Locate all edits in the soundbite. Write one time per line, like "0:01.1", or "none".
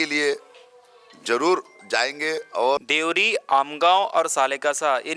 0:02.8